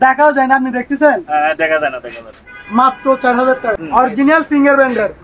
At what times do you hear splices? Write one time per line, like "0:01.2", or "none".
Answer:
0:03.8